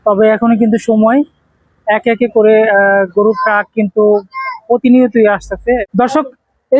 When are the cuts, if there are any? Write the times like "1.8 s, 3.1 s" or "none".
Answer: 5.8 s